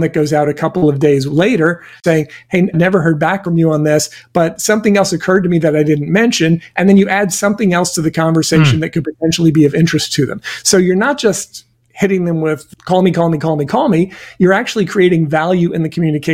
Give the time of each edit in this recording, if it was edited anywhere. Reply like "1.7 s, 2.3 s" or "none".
1.9 s